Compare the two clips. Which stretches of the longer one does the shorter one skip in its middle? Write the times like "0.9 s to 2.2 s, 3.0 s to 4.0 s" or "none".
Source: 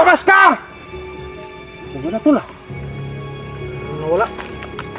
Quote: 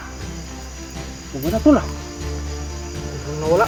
none